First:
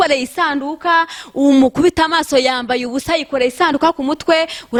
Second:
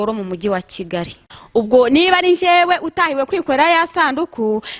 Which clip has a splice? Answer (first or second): second